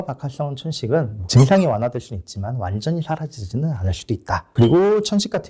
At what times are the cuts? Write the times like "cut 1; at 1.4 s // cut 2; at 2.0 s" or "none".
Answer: cut 1; at 1.3 s // cut 2; at 4.5 s